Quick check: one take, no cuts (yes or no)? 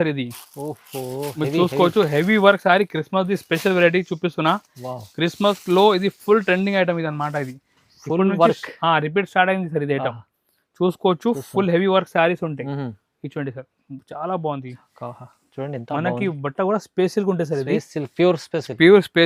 yes